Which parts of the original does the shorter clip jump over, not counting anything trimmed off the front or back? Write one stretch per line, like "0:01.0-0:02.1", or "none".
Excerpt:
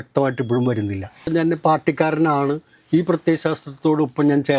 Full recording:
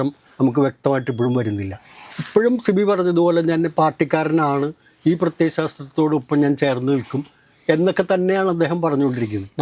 0:02.0-0:03.4